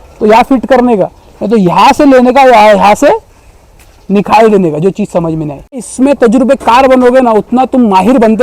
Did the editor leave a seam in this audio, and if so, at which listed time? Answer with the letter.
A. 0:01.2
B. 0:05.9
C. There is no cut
B